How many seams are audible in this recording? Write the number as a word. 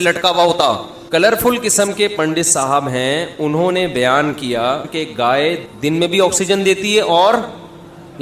three